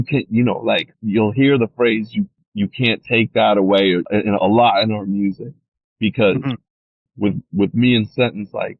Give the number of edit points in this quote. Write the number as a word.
four